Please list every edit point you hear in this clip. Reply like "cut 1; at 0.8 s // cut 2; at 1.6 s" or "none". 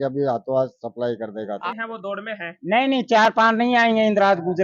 cut 1; at 1.6 s